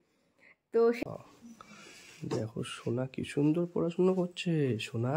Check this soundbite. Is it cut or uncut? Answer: cut